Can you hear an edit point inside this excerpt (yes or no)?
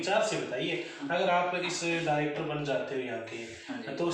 no